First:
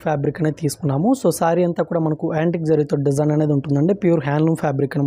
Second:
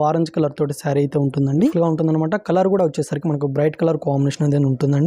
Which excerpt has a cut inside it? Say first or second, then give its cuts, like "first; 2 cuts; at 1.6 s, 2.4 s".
second; 1 cut; at 1.6 s